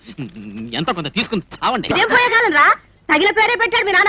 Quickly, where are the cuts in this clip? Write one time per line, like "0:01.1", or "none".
0:01.9